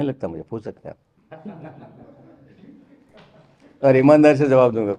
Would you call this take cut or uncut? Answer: uncut